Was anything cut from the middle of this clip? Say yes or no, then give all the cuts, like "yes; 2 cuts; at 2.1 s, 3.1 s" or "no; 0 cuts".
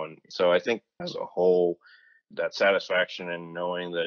no; 0 cuts